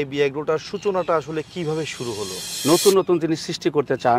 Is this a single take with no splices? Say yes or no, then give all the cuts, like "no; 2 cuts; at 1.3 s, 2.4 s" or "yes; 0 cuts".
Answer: no; 1 cut; at 2.5 s